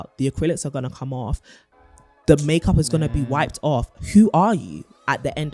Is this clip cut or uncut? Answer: uncut